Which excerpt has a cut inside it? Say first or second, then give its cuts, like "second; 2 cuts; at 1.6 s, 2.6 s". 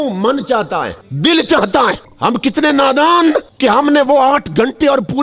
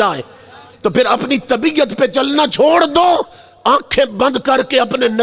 first; 3 cuts; at 1.0 s, 2.1 s, 3.5 s